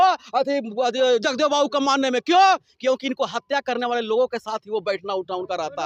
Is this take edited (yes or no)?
no